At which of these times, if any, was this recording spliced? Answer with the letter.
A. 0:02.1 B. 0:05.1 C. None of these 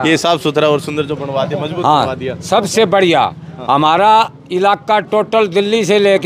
C